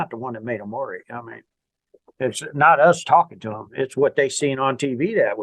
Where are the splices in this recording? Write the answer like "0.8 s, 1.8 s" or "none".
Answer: none